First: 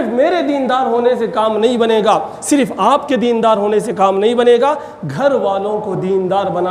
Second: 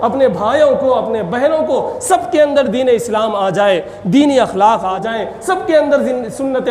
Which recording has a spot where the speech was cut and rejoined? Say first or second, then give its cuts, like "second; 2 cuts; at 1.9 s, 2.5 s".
second; 1 cut; at 4.9 s